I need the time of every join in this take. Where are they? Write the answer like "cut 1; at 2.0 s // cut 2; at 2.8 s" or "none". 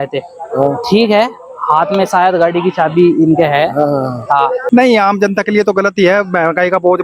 cut 1; at 4.6 s